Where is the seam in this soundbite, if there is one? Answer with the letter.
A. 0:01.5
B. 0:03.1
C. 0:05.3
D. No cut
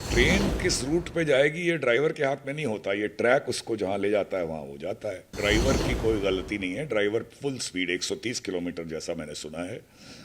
C